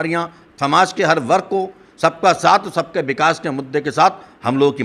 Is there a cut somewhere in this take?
no; 0 cuts

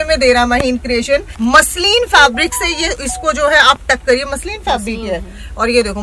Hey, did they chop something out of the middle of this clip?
yes; 1 cut; at 1.3 s

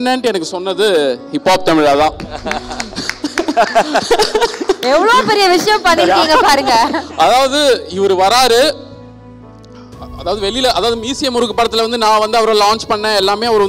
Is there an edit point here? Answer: no; 0 cuts

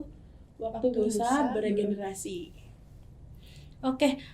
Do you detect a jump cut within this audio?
no; 0 cuts

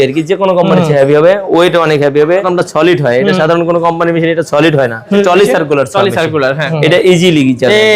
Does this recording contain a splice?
yes; 3 cuts; at 2.5 s, 5.1 s, 6.7 s

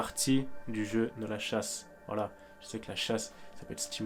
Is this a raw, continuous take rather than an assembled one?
yes; 0 cuts

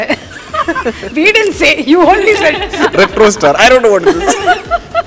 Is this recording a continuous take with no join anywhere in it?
yes; 0 cuts

